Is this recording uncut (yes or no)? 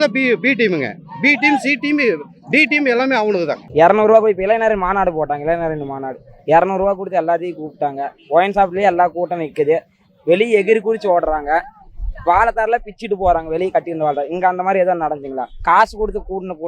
no